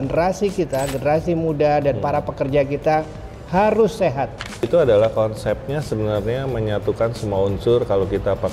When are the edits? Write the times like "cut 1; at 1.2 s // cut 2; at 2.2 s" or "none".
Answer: cut 1; at 4.7 s